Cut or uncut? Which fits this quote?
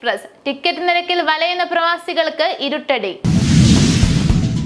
cut